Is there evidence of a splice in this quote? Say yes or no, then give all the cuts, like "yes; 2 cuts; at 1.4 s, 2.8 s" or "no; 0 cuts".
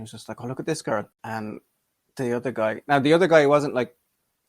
yes; 1 cut; at 1.1 s